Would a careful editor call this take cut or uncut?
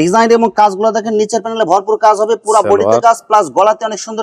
uncut